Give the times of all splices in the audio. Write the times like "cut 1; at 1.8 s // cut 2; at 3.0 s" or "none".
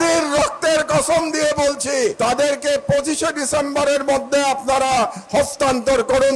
cut 1; at 2.2 s